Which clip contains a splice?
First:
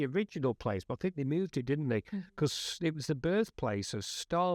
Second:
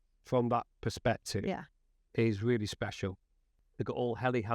second; 1 cut; at 3.4 s

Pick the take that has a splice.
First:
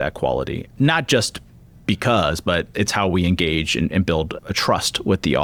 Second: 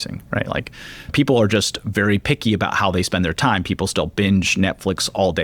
second; 1 cut; at 1.1 s

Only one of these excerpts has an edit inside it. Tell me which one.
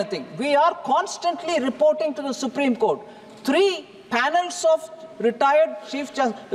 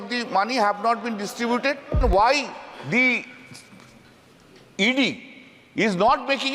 second; 1 cut; at 2.0 s

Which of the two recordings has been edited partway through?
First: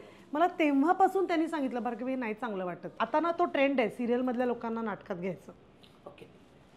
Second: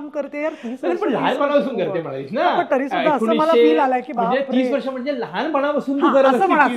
first; 1 cut; at 2.9 s

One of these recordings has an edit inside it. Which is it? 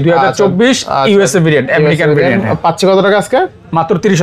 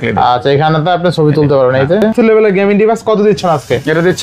second; 1 cut; at 2.1 s

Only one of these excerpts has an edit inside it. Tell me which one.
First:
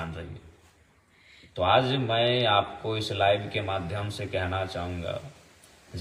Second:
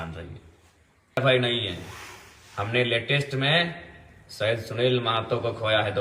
second; 1 cut; at 1.2 s

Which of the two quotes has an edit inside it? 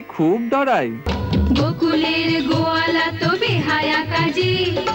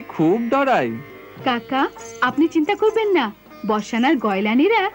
first; 1 cut; at 1.1 s

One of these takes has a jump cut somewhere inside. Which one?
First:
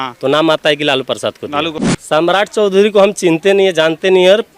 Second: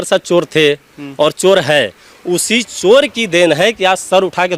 first; 1 cut; at 1.8 s

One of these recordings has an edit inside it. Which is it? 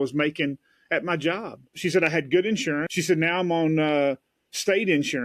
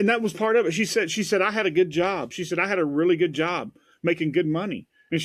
first; 2 cuts; at 1.6 s, 2.9 s

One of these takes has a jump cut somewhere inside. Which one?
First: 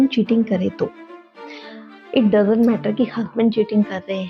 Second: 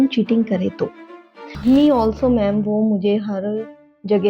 second; 1 cut; at 1.4 s

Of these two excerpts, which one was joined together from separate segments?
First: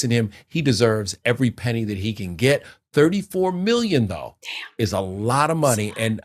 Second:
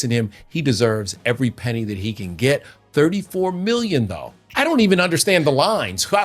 second; 1 cut; at 4.5 s

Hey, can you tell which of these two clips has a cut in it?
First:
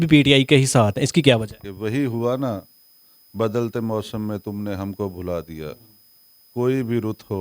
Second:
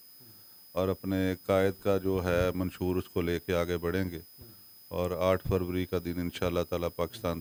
first; 1 cut; at 1.6 s

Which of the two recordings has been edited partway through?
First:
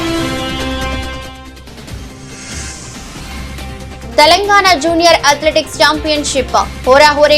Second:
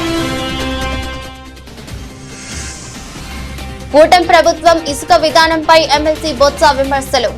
second; 1 cut; at 3.9 s

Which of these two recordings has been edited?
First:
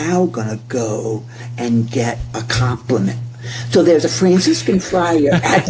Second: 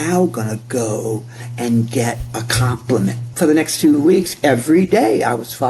second; 1 cut; at 3.3 s

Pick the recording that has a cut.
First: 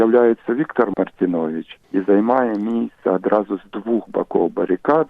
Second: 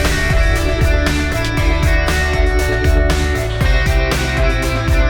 first; 1 cut; at 0.9 s

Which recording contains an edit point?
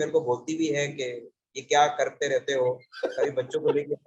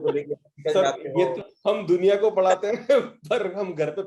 second; 1 cut; at 1.4 s

